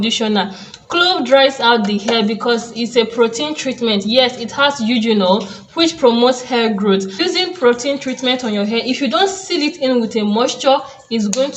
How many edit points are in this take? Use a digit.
1